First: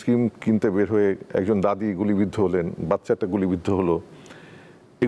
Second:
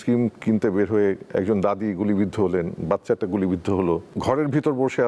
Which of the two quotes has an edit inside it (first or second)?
second